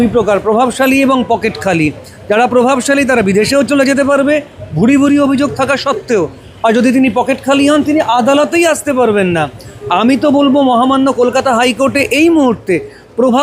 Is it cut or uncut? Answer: uncut